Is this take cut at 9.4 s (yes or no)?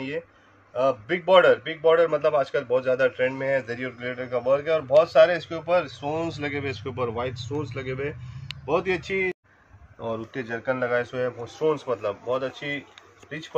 yes